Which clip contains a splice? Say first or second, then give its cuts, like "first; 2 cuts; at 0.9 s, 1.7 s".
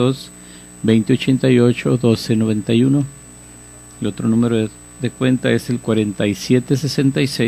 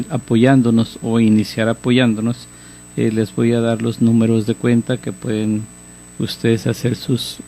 second; 1 cut; at 4.4 s